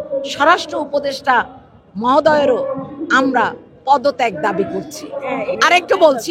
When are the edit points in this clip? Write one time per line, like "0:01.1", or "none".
none

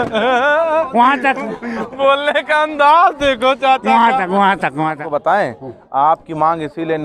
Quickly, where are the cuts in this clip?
0:05.0

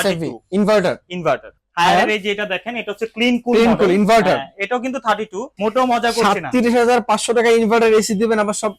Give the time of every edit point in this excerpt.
0:01.5
0:05.4

